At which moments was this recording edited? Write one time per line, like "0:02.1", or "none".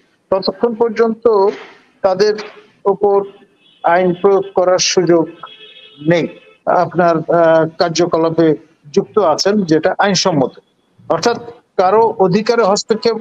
0:06.5